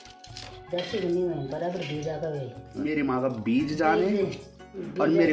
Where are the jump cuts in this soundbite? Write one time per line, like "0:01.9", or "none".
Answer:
0:02.8